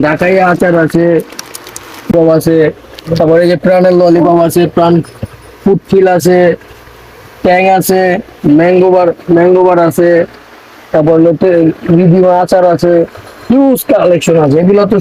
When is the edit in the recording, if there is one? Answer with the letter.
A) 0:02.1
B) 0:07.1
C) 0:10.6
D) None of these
A